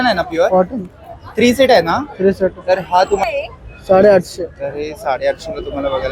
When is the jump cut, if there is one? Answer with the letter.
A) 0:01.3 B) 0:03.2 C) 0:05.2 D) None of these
B